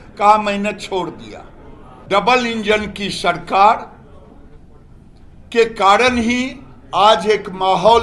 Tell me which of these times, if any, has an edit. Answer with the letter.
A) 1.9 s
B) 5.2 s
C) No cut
A